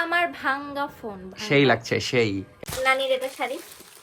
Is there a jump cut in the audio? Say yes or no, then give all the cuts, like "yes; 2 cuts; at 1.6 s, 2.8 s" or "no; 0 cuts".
yes; 1 cut; at 2.5 s